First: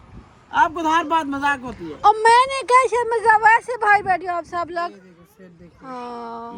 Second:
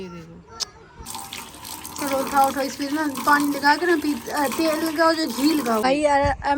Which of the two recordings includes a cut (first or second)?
second